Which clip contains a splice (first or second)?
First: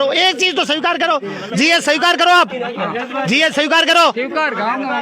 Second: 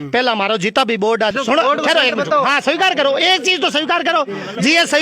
second